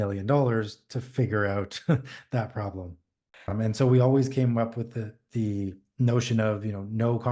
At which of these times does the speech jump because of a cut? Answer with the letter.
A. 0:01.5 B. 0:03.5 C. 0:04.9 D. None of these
B